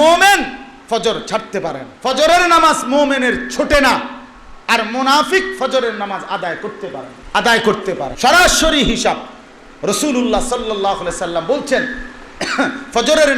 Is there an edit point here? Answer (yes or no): yes